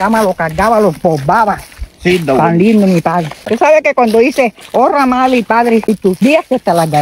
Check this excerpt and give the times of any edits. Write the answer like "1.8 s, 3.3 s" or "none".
3.4 s, 6.0 s